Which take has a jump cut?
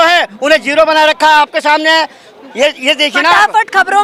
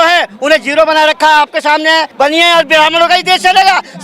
second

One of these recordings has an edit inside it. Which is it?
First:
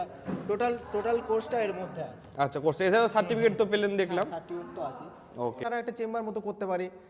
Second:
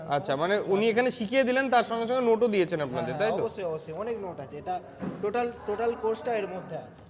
first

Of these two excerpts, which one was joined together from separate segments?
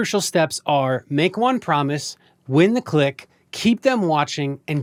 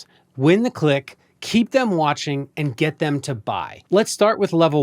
second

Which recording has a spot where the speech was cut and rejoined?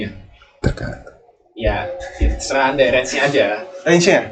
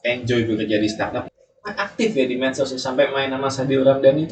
second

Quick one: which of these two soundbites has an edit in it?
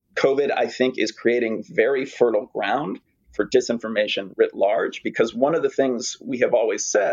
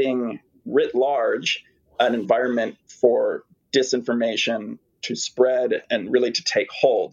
second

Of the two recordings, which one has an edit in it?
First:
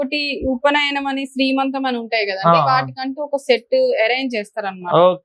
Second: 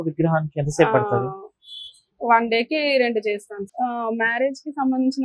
second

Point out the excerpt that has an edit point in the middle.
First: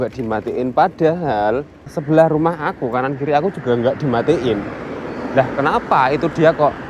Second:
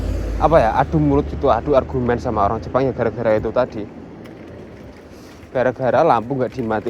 first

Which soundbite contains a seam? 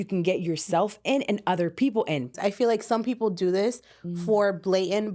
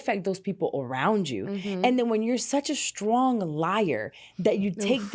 first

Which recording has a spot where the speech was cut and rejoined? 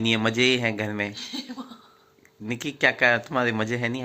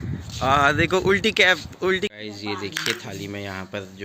second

